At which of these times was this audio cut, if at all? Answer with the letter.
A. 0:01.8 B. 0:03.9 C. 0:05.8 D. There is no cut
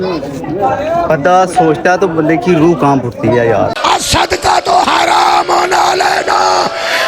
B